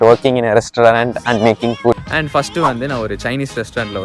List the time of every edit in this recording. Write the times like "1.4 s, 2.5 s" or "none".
2.1 s